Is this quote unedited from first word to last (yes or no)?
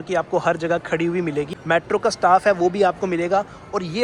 no